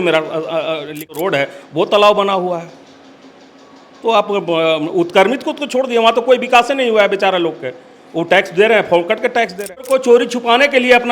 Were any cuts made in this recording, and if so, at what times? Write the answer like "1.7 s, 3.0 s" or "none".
1.1 s, 9.9 s

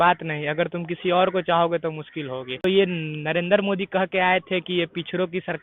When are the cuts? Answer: 2.6 s

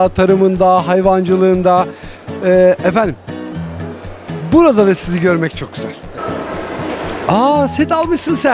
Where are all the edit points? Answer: 6.1 s

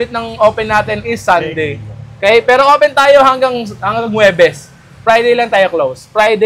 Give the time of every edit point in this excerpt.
none

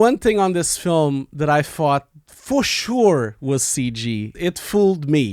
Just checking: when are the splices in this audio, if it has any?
4.3 s

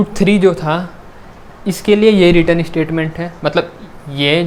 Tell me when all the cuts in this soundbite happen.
none

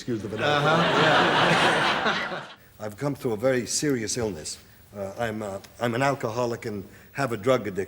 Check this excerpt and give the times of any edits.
2.2 s

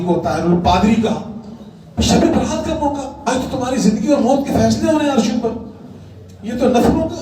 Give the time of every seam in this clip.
3.2 s

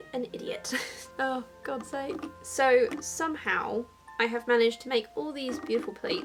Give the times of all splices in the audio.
none

